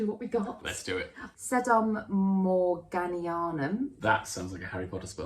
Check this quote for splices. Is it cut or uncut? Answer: cut